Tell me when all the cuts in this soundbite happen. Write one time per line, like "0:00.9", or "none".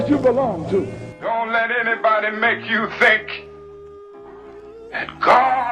0:01.0